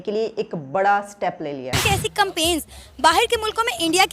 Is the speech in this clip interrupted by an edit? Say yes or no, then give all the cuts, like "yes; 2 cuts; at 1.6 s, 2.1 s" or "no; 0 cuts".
yes; 1 cut; at 1.7 s